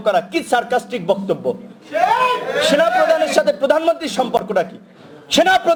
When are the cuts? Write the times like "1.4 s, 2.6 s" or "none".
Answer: none